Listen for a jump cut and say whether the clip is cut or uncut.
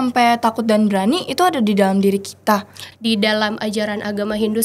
cut